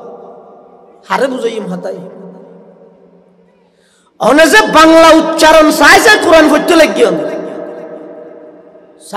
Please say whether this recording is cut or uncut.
uncut